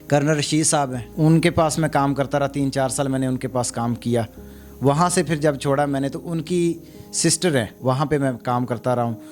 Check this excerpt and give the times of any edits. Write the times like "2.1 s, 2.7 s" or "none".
1.0 s, 7.7 s